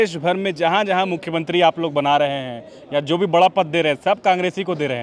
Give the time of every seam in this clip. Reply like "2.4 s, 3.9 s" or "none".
none